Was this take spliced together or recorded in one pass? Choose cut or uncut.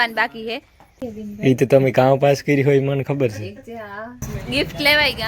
cut